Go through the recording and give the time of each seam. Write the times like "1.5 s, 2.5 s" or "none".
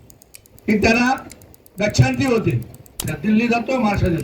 3.1 s